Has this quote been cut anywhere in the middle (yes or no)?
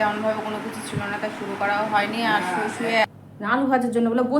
yes